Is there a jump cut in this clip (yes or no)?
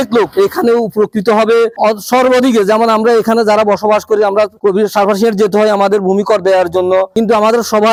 no